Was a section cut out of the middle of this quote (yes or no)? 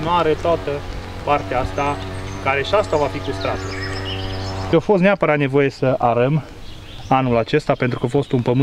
yes